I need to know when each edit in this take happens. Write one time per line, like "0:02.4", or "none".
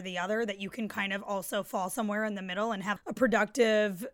0:03.0